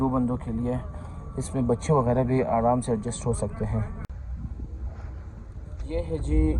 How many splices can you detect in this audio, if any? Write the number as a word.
one